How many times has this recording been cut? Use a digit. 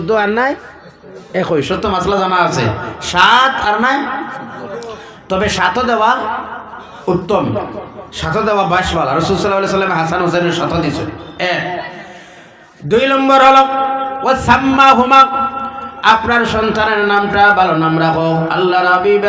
0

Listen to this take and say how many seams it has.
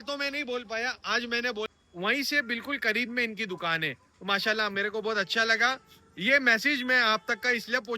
1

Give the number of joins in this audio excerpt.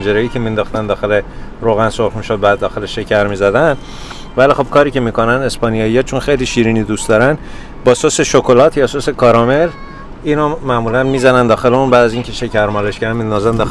0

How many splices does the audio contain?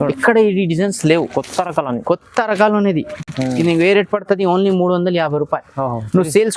0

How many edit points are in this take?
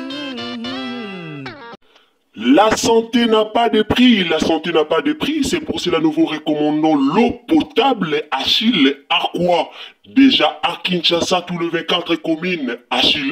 1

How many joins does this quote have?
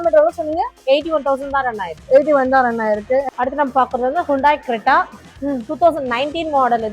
1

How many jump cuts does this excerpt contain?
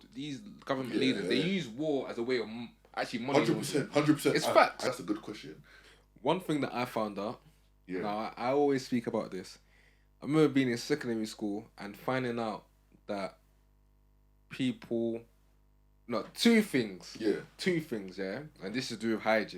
1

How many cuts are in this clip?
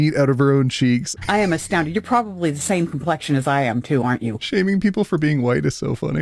2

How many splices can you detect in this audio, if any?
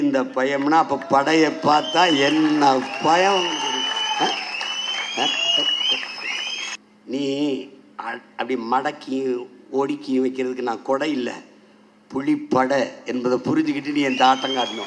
1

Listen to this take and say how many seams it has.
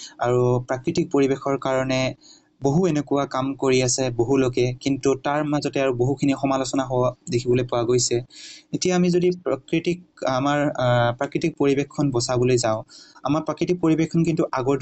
0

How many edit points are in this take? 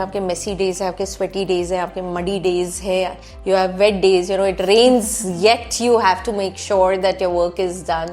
0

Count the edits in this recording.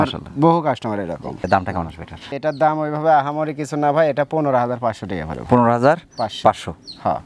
0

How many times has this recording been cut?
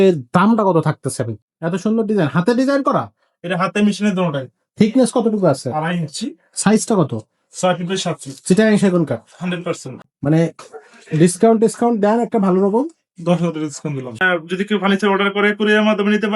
3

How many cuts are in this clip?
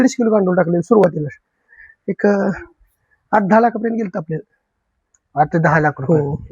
1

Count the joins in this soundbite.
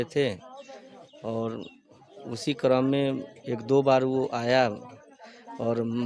0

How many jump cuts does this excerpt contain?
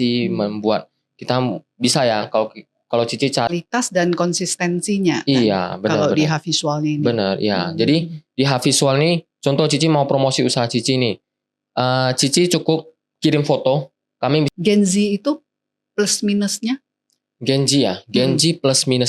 2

